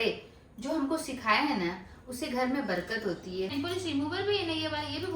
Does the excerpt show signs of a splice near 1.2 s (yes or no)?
no